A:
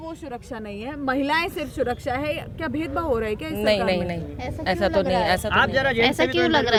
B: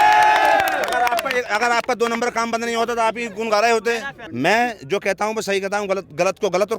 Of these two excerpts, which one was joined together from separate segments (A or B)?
B